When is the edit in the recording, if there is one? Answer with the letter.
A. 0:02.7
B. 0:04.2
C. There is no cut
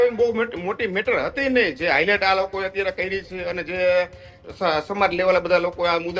C